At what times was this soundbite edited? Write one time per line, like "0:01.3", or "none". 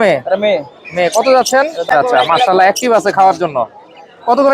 0:01.9